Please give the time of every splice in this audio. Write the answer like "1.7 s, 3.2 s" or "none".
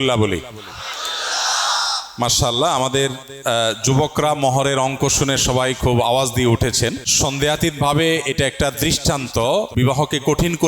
7.1 s, 9.7 s